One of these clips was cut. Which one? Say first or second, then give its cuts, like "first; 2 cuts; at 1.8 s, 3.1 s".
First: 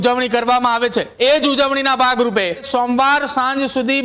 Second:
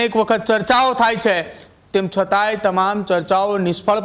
first; 2 cuts; at 1.1 s, 2.6 s